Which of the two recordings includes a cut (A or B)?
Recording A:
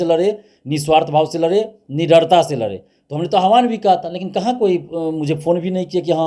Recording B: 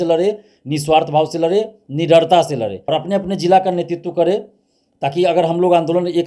B